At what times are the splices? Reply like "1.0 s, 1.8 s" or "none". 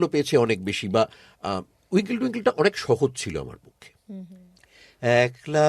4.3 s